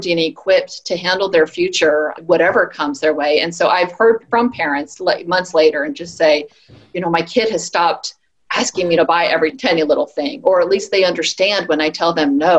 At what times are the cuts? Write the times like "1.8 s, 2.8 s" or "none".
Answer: 9.6 s